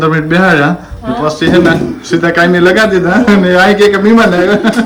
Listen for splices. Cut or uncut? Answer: uncut